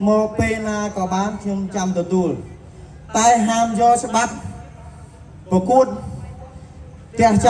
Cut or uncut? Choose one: uncut